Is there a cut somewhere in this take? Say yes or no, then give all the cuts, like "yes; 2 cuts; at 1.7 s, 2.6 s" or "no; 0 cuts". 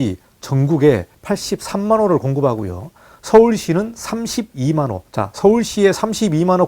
yes; 2 cuts; at 1.1 s, 5.0 s